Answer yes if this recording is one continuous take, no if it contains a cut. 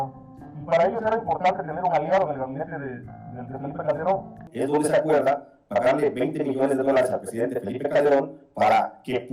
no